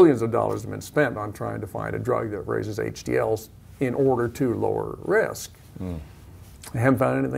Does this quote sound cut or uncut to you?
uncut